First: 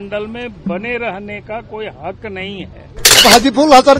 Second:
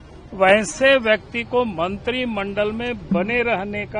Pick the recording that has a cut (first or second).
first